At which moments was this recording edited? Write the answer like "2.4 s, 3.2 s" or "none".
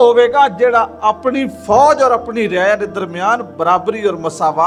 none